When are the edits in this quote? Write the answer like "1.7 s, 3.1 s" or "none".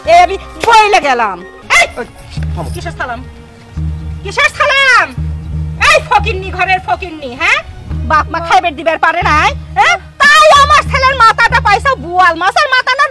1.5 s